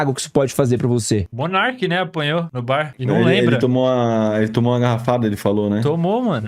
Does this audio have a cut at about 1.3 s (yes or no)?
yes